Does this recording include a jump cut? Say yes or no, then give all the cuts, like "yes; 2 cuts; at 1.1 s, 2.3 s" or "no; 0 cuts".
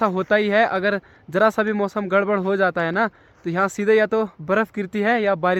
no; 0 cuts